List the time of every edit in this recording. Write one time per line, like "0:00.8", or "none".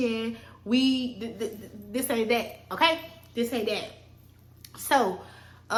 none